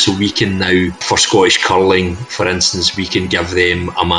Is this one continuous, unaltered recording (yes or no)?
no